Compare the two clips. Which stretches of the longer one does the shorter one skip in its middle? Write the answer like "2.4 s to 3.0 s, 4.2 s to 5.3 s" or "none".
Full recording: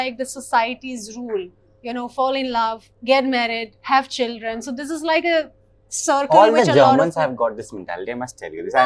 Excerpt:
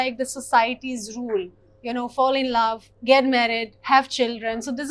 none